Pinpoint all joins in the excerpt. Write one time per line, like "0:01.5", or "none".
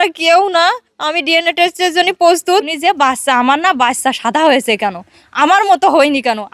0:02.7